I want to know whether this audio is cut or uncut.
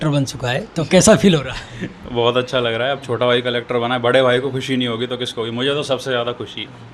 uncut